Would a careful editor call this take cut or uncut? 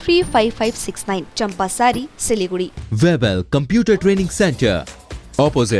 cut